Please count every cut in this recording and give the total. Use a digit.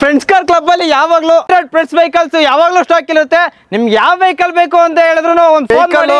1